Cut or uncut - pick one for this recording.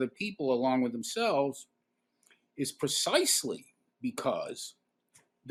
uncut